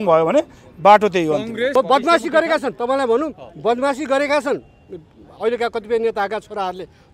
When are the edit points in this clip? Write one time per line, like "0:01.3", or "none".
0:01.7